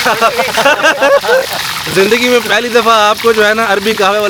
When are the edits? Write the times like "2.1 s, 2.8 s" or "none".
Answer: none